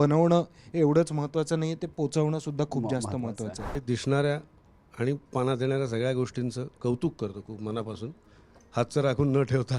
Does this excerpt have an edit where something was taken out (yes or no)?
yes